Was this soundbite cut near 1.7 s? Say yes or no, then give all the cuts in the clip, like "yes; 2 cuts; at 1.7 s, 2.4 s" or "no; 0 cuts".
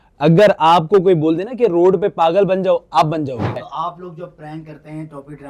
no; 1 cut; at 3.7 s